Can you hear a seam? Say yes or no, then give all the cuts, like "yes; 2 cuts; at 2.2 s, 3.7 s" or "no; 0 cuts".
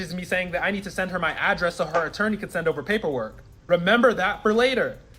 yes; 1 cut; at 1.8 s